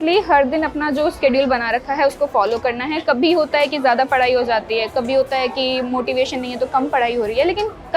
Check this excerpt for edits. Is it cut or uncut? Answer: uncut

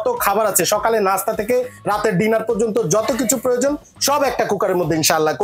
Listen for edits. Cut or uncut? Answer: uncut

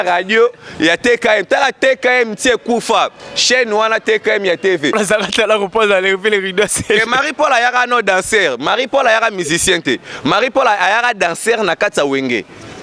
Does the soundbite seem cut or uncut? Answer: cut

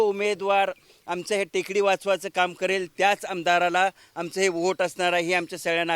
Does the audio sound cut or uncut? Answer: uncut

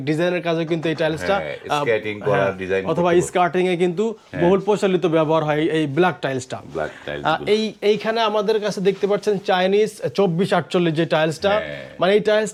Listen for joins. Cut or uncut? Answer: uncut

